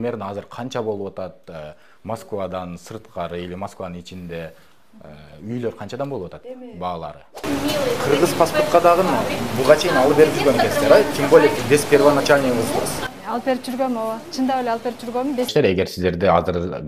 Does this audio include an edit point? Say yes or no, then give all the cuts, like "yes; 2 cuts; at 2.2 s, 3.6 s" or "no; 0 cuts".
yes; 2 cuts; at 7.4 s, 15.5 s